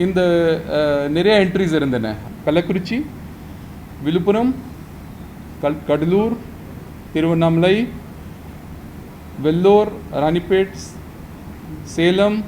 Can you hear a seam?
yes; 1 cut; at 2.2 s

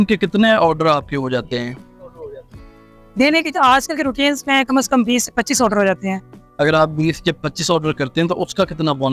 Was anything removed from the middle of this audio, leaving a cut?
no; 0 cuts

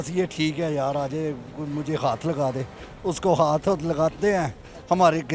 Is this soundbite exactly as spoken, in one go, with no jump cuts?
yes; 0 cuts

